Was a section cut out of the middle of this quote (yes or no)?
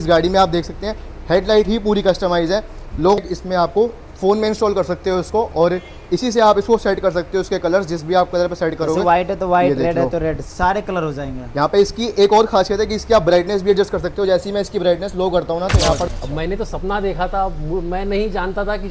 yes